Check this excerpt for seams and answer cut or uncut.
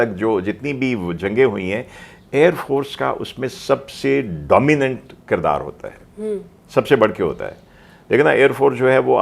uncut